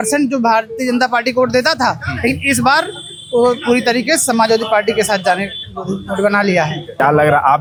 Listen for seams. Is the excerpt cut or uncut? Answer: uncut